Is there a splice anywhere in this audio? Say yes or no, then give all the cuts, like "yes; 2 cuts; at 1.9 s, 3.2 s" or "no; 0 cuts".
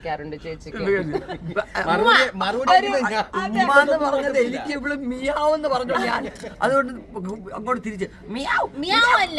no; 0 cuts